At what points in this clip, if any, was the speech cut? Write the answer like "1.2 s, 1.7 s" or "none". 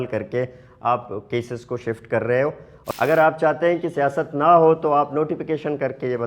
2.7 s